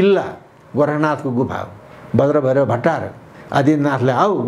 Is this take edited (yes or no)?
yes